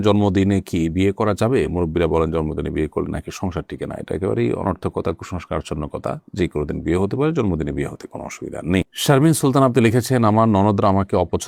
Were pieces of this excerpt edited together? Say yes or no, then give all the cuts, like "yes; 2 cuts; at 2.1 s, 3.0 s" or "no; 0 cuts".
no; 0 cuts